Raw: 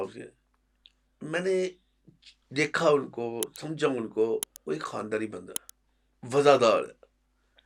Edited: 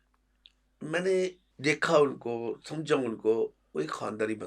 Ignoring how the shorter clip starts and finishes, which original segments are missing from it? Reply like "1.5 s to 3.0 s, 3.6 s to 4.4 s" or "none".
1.9 s to 2.4 s